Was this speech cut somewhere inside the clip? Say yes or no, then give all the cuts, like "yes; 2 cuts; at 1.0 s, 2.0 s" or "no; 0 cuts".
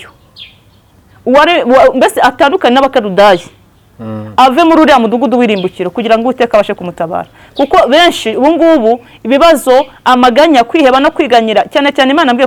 no; 0 cuts